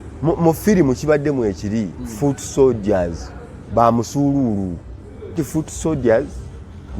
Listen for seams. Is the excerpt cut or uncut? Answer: cut